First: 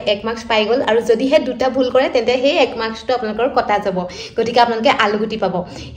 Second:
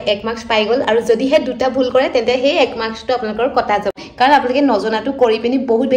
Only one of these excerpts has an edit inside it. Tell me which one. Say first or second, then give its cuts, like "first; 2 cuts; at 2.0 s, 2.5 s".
second; 1 cut; at 4.1 s